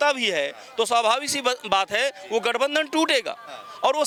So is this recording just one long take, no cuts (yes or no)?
yes